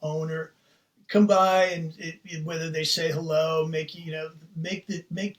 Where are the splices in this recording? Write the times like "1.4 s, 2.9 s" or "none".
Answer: none